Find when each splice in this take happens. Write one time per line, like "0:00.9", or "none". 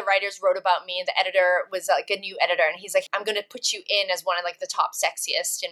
0:03.1